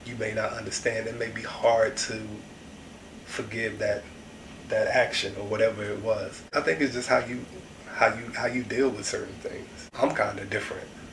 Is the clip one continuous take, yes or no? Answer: no